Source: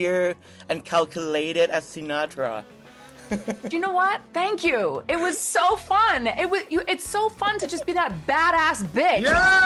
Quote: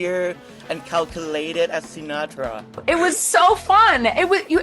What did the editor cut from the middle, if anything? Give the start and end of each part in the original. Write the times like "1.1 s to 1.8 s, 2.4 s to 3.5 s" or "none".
2.8 s to 5.0 s